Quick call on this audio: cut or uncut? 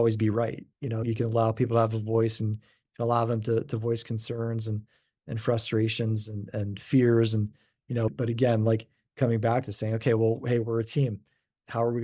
cut